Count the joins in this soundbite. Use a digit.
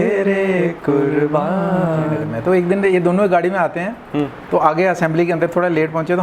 1